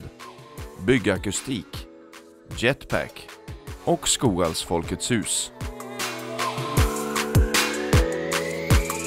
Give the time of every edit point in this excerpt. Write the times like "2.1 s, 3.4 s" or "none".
5.4 s